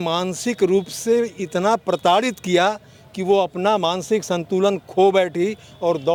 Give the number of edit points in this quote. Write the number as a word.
zero